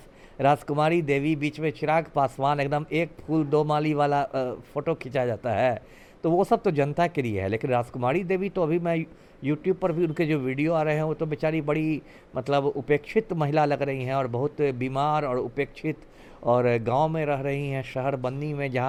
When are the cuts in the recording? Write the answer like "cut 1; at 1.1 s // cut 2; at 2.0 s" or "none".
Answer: none